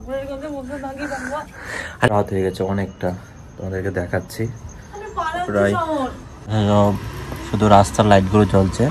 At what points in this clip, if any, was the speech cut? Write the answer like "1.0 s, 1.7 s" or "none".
2.1 s, 6.5 s